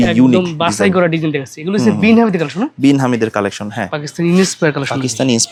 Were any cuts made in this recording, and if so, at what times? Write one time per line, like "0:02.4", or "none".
none